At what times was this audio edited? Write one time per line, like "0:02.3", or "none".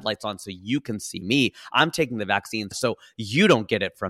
0:02.7

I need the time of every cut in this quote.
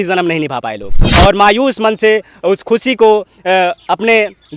0:01.0

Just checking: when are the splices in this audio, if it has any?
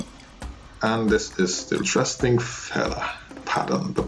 0:01.8

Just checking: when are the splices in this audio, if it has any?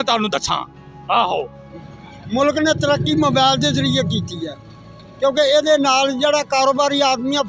0:01.6

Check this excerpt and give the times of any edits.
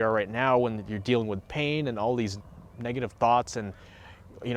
none

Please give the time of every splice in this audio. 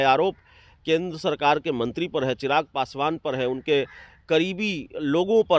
none

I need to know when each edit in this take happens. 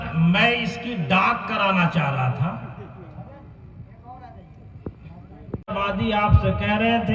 0:05.7

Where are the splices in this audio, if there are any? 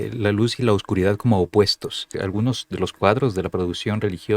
0:02.2

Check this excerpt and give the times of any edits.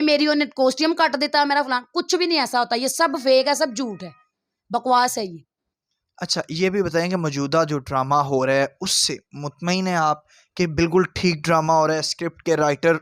none

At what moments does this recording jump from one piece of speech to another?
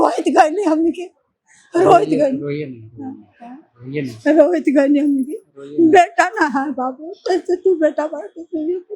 none

